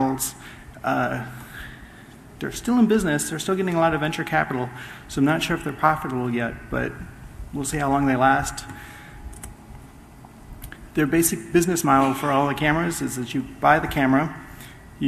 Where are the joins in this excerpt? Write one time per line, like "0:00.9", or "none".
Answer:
none